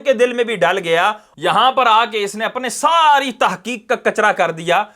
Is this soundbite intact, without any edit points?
no; 1 cut; at 1.3 s

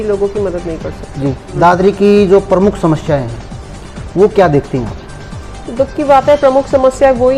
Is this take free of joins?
no; 1 cut; at 1.5 s

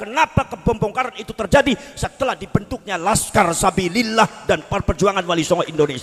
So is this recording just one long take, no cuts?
yes; 0 cuts

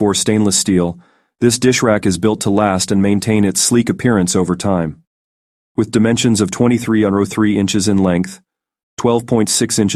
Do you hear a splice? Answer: no; 0 cuts

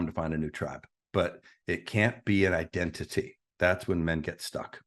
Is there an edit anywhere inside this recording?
yes; 1 cut; at 3.4 s

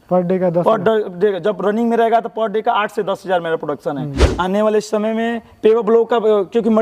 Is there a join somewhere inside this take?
yes; 1 cut; at 4.2 s

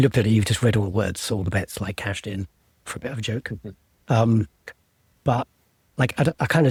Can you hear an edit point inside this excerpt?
no; 0 cuts

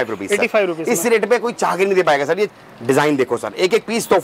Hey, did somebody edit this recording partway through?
yes; 1 cut; at 2.5 s

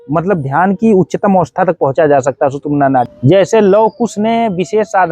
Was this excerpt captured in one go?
no; 1 cut; at 3.1 s

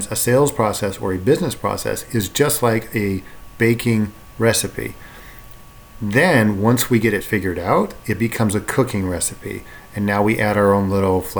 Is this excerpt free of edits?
yes; 0 cuts

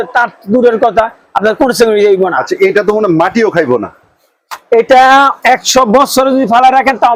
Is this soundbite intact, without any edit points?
yes; 0 cuts

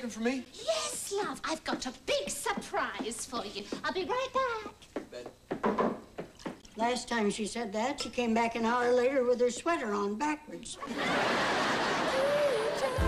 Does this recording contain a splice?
no; 0 cuts

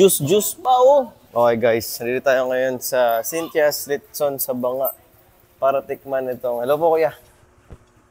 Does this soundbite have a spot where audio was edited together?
no; 0 cuts

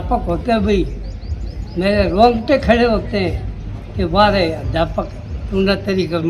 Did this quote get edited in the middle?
no; 0 cuts

